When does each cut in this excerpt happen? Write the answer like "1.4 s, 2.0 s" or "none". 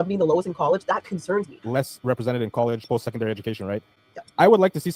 1.6 s